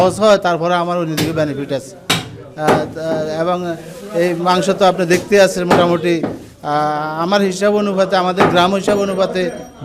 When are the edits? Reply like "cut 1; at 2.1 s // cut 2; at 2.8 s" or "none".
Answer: none